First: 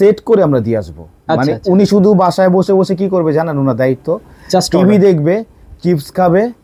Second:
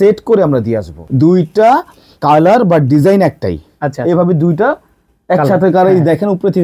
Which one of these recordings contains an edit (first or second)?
second